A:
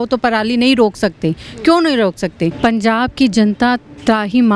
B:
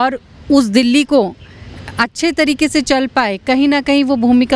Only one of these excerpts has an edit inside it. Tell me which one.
A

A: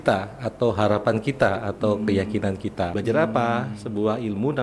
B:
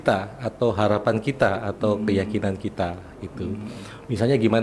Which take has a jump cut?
A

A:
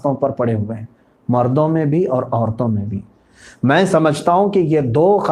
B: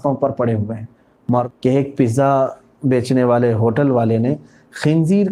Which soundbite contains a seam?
B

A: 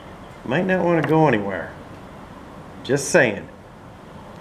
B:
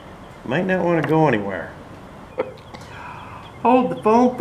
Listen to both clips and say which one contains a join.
B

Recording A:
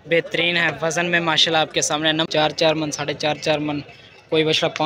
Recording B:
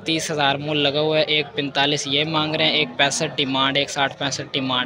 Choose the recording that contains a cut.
A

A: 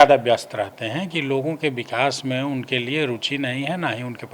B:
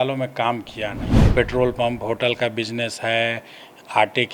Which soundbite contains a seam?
B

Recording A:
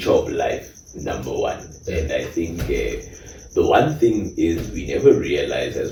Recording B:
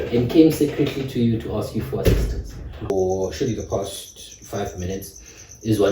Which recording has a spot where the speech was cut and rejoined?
B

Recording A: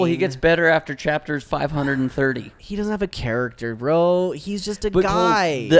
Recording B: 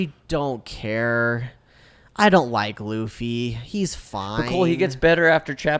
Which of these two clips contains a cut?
A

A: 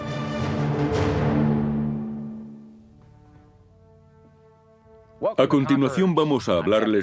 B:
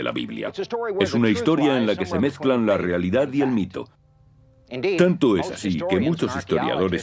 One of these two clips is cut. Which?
A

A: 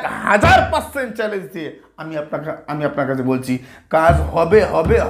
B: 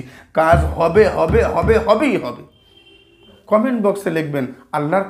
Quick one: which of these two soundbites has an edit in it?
B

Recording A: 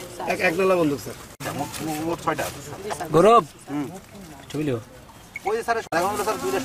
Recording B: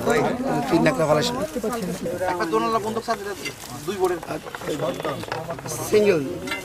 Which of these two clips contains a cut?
A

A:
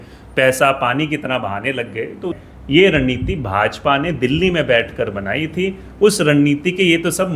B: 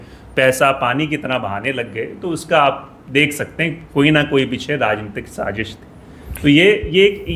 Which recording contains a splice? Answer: A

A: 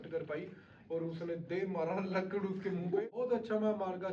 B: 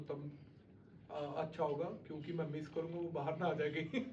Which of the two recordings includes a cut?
A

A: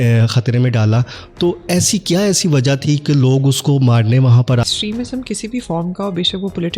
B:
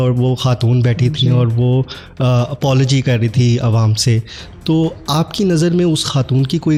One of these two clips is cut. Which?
A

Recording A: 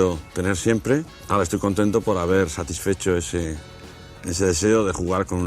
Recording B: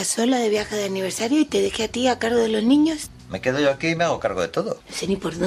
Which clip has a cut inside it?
A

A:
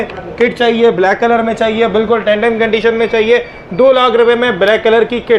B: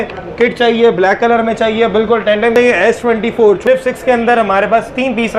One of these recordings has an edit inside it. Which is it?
B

